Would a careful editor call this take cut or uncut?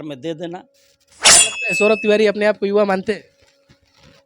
cut